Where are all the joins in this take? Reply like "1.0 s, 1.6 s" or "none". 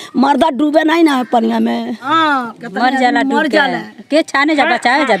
2.1 s

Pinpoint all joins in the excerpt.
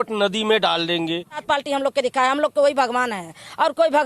1.4 s

